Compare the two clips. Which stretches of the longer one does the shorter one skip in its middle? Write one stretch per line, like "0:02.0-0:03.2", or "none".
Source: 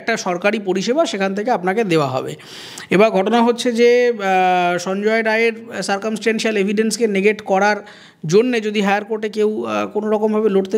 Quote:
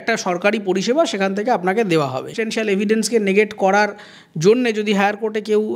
0:02.4-0:06.3